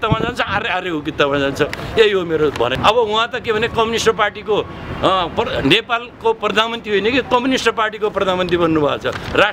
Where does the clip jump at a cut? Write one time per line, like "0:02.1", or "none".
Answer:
0:02.8